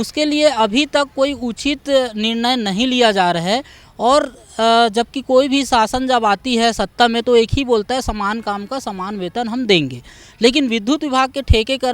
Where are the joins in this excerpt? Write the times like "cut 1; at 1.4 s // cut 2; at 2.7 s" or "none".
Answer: none